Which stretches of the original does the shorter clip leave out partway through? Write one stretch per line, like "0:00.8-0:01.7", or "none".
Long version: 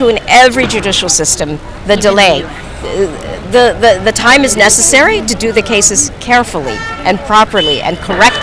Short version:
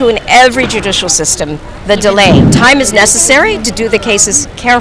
0:02.5-0:04.2

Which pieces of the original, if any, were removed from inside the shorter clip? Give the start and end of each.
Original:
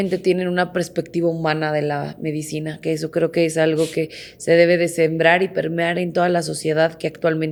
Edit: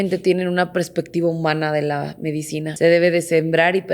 0:02.6-0:04.3

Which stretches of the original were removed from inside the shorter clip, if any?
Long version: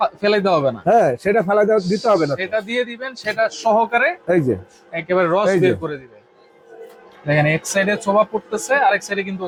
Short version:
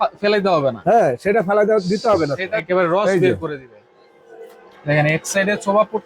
0:02.6-0:05.0

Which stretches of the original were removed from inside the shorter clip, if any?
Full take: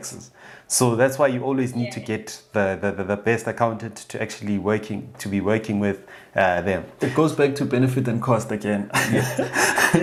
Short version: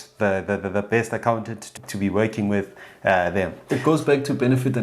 0:04.1-0:05.0

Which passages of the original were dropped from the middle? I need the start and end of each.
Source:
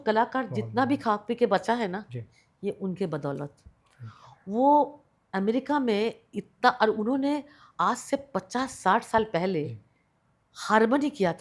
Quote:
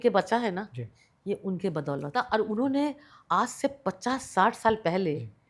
0:03.4-0:06.5

